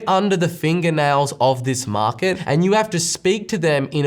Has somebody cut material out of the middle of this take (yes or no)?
yes